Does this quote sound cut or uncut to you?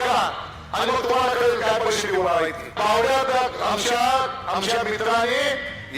cut